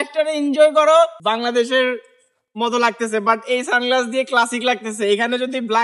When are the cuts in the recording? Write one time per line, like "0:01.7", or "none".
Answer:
0:01.2